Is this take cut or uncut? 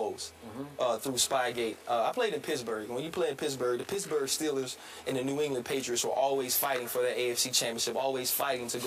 uncut